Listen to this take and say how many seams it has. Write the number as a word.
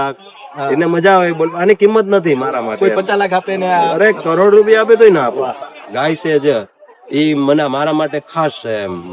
one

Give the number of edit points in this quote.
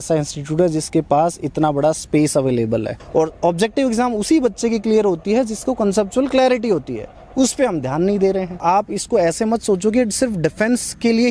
two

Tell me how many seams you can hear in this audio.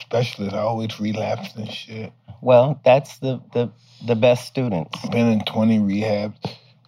one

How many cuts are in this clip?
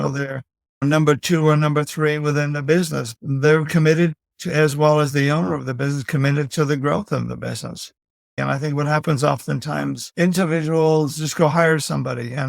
one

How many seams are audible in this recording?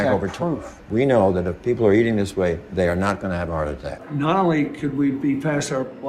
one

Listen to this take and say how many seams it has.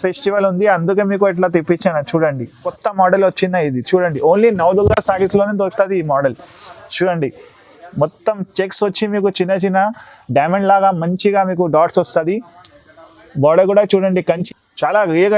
two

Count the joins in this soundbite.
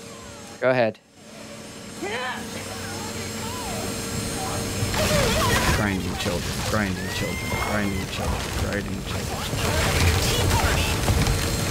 zero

